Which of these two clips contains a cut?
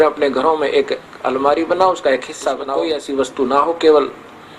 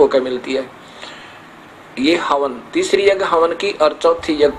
first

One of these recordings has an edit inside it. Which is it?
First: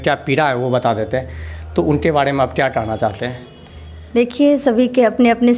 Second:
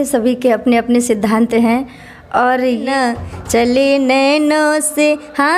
second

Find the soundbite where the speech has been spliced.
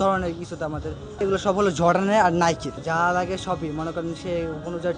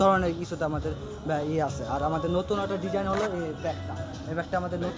first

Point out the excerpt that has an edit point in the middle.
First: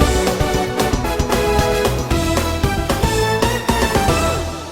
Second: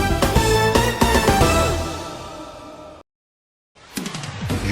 second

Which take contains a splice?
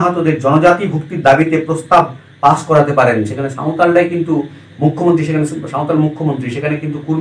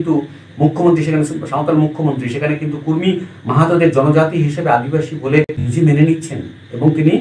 second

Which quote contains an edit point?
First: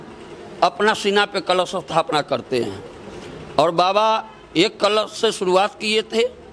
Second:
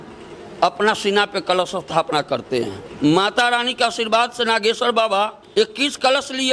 second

